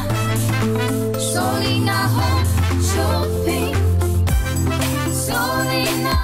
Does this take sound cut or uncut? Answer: uncut